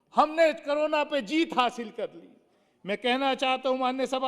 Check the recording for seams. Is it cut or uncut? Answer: uncut